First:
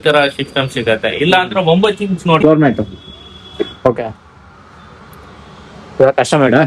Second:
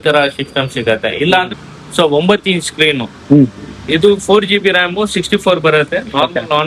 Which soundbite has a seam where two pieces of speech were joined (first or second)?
first